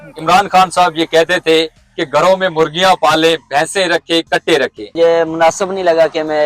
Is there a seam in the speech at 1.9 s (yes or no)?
no